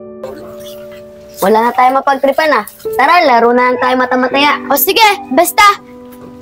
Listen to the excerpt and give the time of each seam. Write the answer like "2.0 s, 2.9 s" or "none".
1.0 s